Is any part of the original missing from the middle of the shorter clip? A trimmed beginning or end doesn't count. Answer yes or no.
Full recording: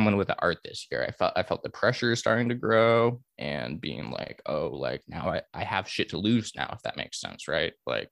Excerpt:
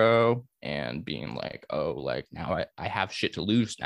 no